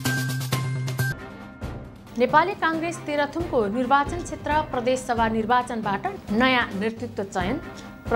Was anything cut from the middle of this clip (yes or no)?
yes